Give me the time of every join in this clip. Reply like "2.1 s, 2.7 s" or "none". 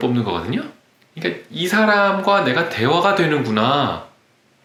none